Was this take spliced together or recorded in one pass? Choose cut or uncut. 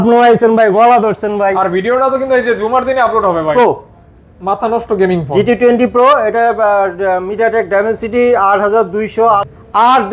cut